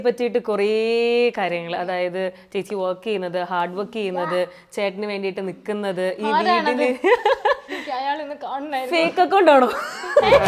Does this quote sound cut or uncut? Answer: uncut